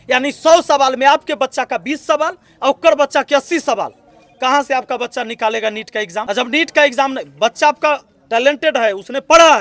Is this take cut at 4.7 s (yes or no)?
no